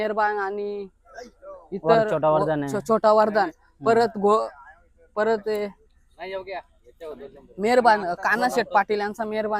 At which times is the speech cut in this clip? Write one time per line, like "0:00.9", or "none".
none